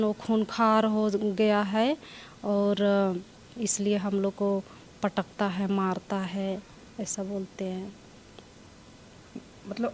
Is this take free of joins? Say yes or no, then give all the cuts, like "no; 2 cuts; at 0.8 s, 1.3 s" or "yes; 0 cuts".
yes; 0 cuts